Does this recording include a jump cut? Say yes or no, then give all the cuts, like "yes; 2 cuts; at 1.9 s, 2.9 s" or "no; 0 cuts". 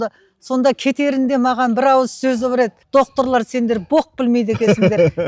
yes; 1 cut; at 2.8 s